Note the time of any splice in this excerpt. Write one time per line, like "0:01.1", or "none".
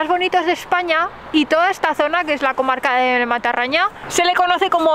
0:04.0